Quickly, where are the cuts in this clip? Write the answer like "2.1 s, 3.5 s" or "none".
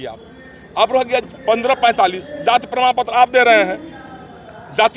none